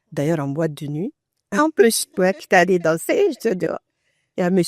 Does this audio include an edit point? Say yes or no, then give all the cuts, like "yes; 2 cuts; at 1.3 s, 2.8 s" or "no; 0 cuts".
no; 0 cuts